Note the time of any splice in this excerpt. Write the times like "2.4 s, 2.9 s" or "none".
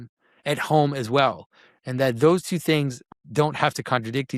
3.0 s

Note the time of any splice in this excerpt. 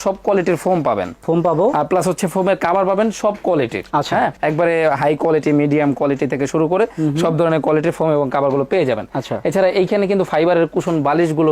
none

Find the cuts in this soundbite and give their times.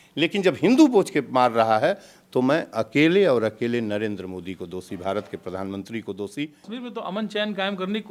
6.7 s

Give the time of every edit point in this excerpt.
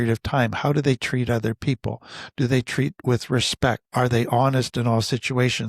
3.8 s

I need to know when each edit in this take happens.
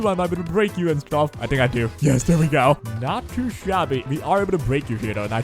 1.4 s, 2.8 s, 4.0 s

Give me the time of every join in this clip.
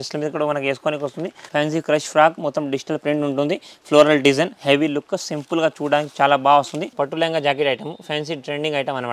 1.4 s, 6.8 s

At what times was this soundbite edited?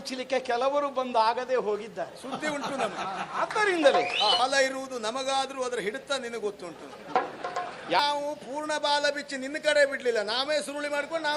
4.4 s, 8.0 s

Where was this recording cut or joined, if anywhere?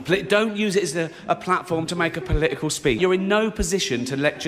3.0 s

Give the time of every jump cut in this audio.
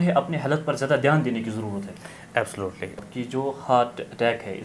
3.0 s

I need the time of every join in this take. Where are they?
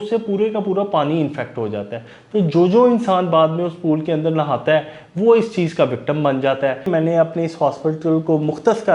6.9 s

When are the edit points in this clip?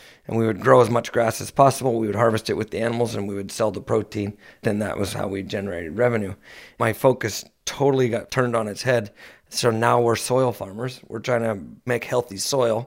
4.6 s, 6.7 s, 8.3 s, 11.9 s

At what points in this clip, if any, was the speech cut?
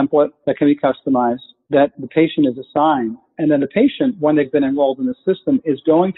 4.5 s

